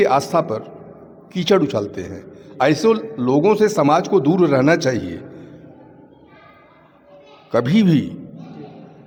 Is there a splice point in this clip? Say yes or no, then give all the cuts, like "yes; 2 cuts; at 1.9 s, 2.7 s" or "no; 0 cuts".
no; 0 cuts